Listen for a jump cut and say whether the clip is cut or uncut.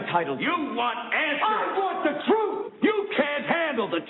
cut